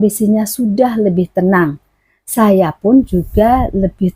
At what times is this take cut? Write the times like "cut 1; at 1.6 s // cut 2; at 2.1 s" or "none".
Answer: none